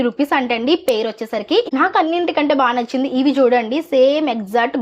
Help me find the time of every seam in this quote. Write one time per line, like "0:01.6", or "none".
0:01.7